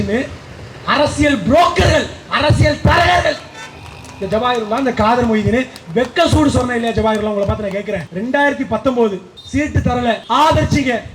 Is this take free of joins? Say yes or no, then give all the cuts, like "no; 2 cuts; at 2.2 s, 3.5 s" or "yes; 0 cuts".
no; 2 cuts; at 8.1 s, 9.8 s